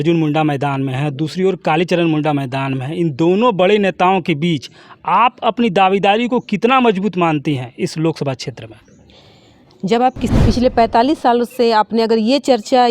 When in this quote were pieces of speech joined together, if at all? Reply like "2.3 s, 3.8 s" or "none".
10.3 s